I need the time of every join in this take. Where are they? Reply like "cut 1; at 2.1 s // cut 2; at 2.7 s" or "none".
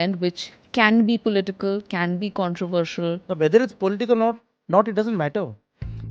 cut 1; at 3.2 s